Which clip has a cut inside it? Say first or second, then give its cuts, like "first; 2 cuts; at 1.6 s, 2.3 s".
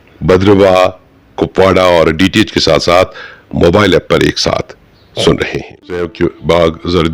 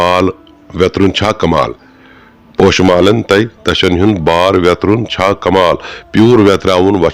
first; 1 cut; at 6.1 s